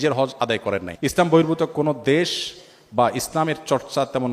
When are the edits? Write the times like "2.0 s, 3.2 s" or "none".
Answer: 1.1 s